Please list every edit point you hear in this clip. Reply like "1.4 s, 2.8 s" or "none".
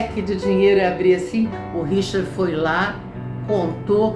none